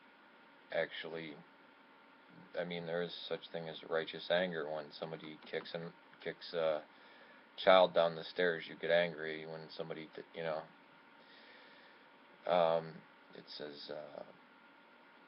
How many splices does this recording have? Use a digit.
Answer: 0